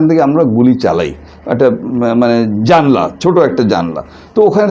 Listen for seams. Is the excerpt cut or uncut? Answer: uncut